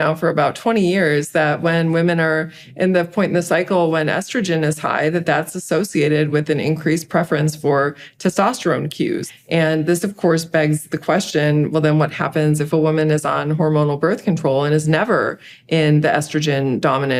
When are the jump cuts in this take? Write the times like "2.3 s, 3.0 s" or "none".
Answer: 9.2 s